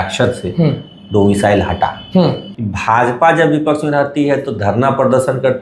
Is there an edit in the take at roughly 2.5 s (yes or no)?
yes